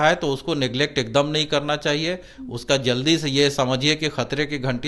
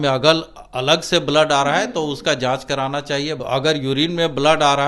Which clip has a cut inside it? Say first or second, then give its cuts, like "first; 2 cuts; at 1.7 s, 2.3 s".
second; 1 cut; at 3.4 s